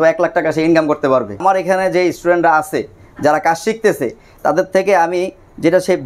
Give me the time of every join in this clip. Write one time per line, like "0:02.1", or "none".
none